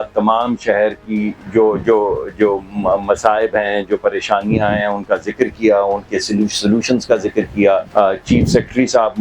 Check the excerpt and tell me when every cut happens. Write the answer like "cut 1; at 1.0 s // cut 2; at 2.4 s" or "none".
none

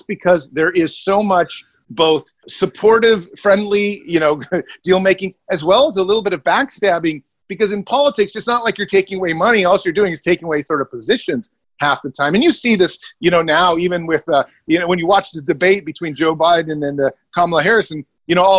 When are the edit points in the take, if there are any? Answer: cut 1; at 2.1 s

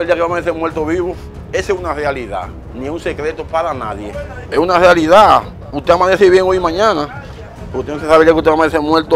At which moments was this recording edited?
cut 1; at 4.4 s

